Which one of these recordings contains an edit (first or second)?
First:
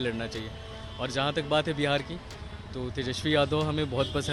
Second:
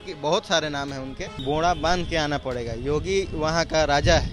second